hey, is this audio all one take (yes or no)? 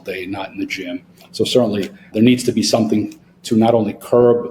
no